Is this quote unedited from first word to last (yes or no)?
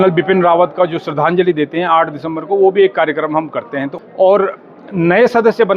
no